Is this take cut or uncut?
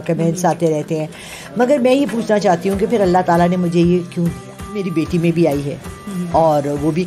cut